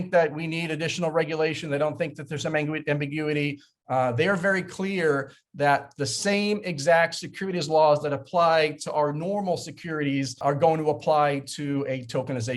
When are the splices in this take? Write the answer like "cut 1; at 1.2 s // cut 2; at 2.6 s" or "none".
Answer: cut 1; at 10.4 s